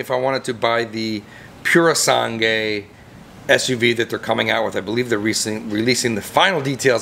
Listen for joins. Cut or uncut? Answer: uncut